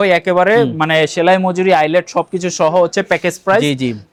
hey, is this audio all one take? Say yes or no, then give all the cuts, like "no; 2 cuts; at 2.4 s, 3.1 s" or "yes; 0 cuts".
yes; 0 cuts